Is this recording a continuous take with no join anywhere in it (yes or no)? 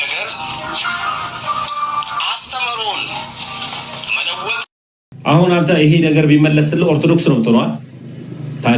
no